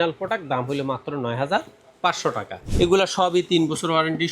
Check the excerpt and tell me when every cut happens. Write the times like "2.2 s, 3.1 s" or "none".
2.6 s